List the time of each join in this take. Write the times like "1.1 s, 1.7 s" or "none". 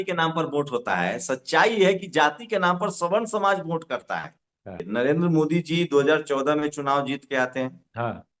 4.8 s